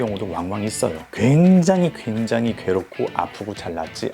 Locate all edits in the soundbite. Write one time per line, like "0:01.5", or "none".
0:01.1